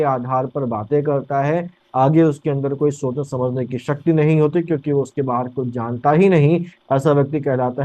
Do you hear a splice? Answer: no; 0 cuts

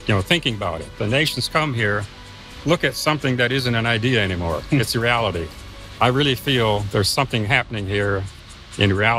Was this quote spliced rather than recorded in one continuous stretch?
yes; 2 cuts; at 0.9 s, 5.8 s

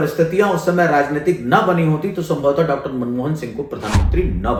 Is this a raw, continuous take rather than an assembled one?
yes; 0 cuts

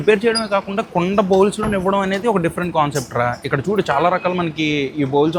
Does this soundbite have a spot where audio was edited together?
no; 0 cuts

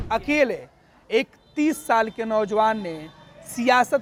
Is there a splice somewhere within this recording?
no; 0 cuts

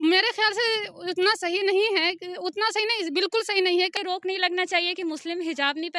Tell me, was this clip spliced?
yes; 1 cut; at 3.9 s

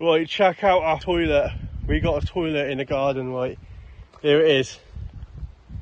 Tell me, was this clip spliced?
yes; 1 cut; at 1.0 s

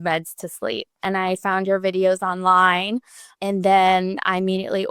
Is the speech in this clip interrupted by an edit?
yes; 2 cuts; at 1.1 s, 3.2 s

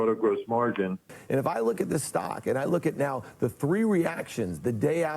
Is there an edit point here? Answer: yes; 1 cut; at 1.0 s

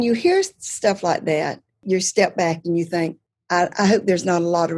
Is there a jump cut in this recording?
yes; 2 cuts; at 1.8 s, 3.3 s

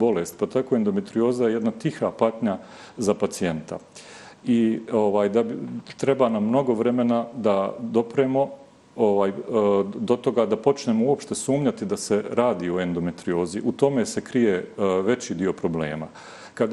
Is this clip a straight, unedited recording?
yes; 0 cuts

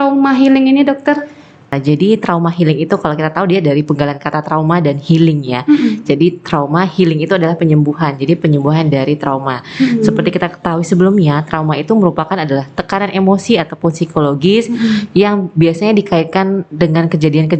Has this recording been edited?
yes; 1 cut; at 1.7 s

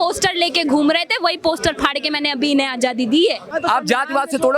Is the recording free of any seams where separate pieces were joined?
no; 1 cut; at 3.5 s

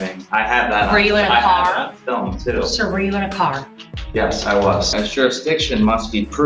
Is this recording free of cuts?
no; 1 cut; at 4.9 s

